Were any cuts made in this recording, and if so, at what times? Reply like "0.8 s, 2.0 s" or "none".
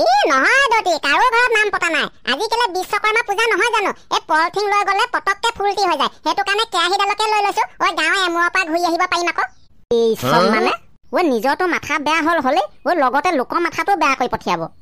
9.7 s